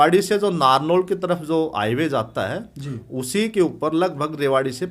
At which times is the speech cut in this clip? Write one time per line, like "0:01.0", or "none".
none